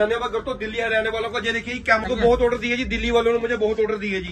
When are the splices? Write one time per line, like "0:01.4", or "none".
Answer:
0:02.1